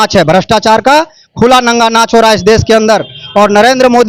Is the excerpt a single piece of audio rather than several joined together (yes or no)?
yes